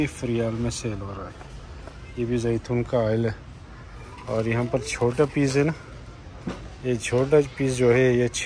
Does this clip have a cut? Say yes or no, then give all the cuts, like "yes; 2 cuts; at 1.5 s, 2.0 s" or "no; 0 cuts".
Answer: no; 0 cuts